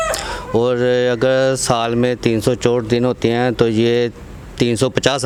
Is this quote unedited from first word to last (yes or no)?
yes